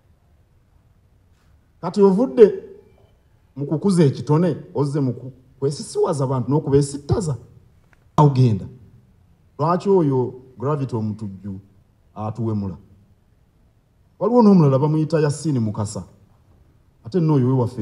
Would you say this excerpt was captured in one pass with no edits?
no; 1 cut; at 8.2 s

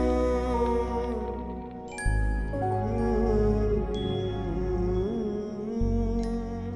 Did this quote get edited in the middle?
no; 0 cuts

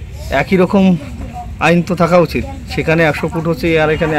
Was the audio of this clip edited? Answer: no; 0 cuts

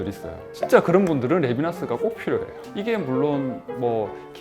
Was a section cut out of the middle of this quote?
yes; 1 cut; at 2.6 s

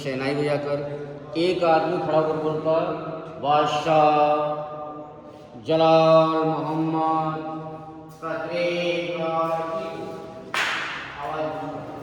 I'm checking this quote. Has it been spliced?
no; 0 cuts

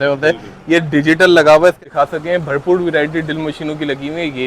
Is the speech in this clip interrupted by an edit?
yes; 1 cut; at 1.8 s

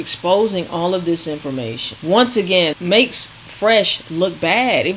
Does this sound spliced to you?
yes; 2 cuts; at 1.9 s, 2.8 s

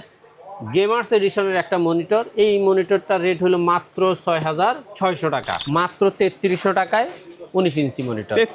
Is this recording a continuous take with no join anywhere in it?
no; 1 cut; at 5.5 s

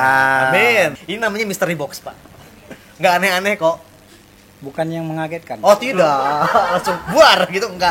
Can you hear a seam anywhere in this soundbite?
yes; 1 cut; at 0.9 s

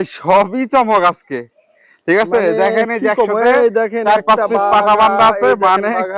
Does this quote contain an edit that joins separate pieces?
no; 0 cuts

